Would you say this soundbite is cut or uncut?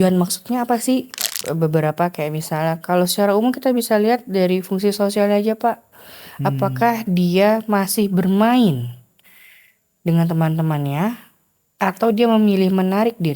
cut